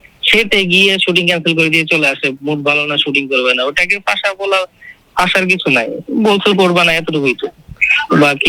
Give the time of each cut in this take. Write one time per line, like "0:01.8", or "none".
none